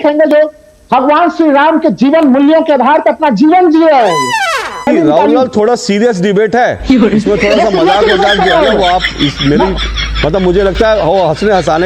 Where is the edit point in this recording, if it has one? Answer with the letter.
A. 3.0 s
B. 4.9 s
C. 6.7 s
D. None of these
B